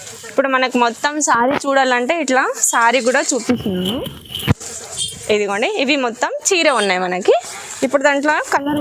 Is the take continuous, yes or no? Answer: yes